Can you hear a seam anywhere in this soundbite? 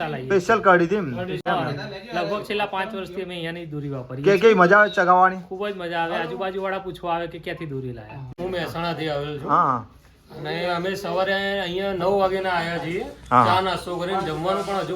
yes; 2 cuts; at 1.4 s, 8.3 s

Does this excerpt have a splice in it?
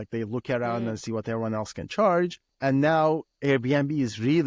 yes; 1 cut; at 2.4 s

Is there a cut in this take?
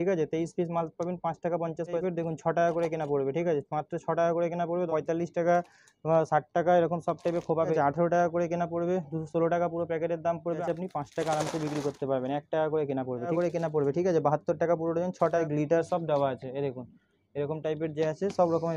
yes; 6 cuts; at 2.0 s, 4.9 s, 7.7 s, 10.6 s, 13.3 s, 15.4 s

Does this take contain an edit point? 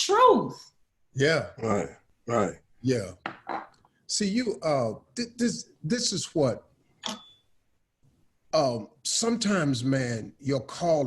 no; 0 cuts

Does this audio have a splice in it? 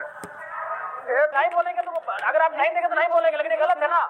yes; 1 cut; at 1.3 s

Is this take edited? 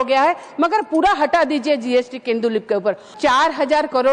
yes; 1 cut; at 3.1 s

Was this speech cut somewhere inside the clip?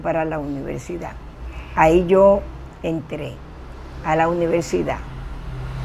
no; 0 cuts

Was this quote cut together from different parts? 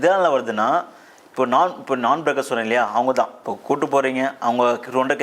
yes; 1 cut; at 3.5 s

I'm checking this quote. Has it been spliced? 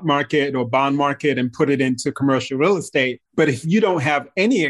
yes; 1 cut; at 3.2 s

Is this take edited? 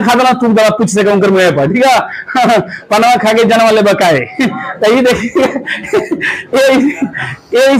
no; 0 cuts

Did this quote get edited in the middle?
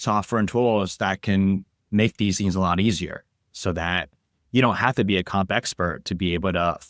no; 0 cuts

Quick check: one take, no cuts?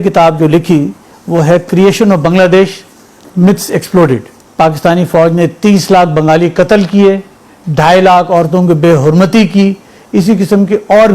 no; 1 cut; at 4.4 s

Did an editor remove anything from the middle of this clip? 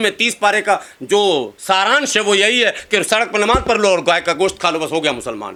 no; 0 cuts

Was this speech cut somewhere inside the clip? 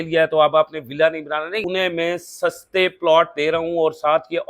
yes; 1 cut; at 1.6 s

